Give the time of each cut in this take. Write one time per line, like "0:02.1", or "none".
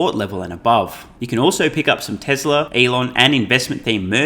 0:01.1
0:02.7